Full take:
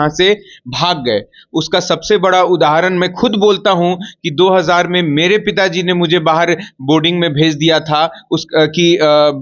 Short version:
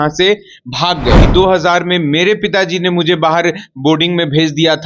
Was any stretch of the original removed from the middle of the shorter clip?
yes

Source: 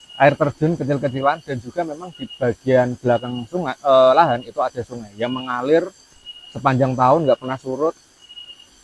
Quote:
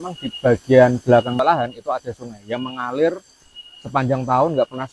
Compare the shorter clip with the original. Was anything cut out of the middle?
yes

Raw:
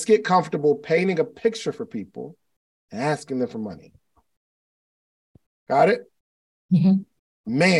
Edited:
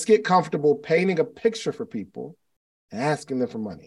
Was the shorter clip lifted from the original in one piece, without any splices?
yes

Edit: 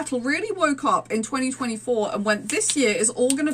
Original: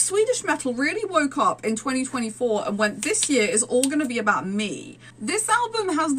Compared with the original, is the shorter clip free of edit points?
yes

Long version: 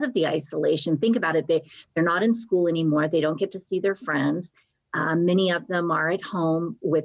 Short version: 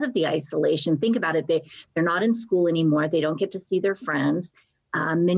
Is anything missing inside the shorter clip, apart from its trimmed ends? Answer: no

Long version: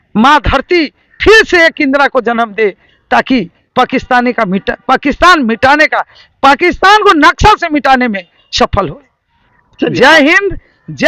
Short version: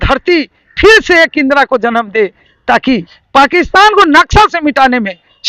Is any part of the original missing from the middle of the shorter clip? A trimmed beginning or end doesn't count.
yes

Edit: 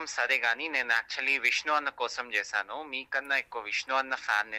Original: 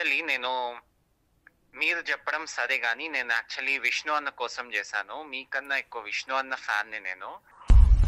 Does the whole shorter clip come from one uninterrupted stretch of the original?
yes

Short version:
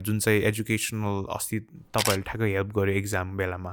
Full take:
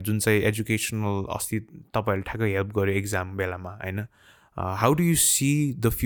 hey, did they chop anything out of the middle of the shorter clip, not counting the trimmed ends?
no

